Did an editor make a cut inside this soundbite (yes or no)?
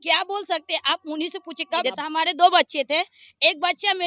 yes